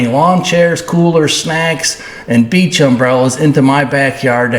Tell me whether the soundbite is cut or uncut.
uncut